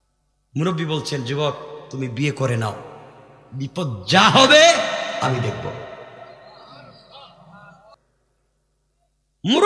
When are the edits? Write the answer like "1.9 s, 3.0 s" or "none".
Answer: 7.9 s